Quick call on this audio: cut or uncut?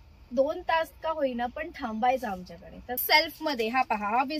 cut